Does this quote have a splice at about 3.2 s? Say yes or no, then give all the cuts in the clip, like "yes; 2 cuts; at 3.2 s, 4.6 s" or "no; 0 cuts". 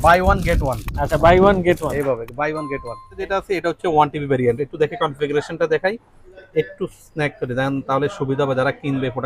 yes; 1 cut; at 3.2 s